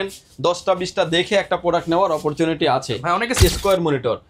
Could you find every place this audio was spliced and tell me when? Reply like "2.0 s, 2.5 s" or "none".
3.4 s